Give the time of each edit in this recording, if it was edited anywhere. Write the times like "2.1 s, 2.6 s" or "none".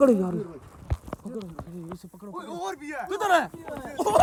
none